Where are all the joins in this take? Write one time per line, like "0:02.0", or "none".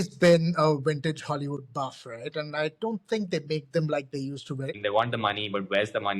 0:04.8

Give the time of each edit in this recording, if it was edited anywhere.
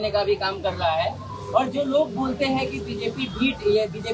none

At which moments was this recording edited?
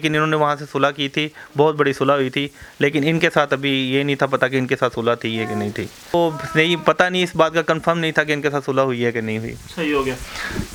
none

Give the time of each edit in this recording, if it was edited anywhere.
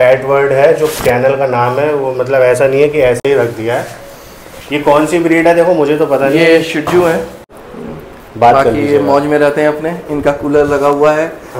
none

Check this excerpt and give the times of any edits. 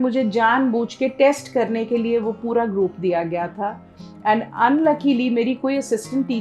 none

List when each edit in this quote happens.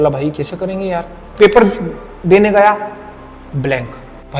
0:01.2

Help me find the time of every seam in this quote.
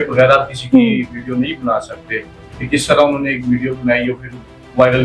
none

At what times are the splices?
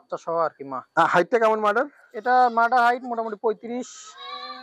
none

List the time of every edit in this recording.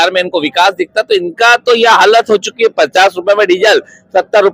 none

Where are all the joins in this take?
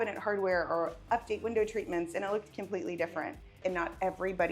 0:03.6

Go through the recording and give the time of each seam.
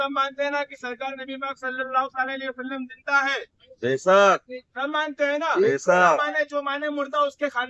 none

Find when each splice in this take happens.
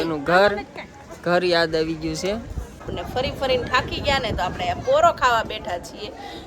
0:02.8

